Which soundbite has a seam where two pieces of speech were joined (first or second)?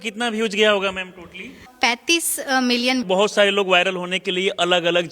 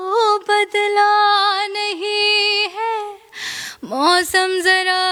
first